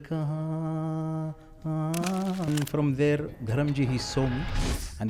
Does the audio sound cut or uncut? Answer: cut